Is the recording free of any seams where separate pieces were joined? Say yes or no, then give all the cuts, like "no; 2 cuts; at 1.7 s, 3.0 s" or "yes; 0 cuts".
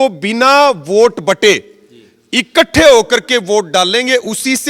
yes; 0 cuts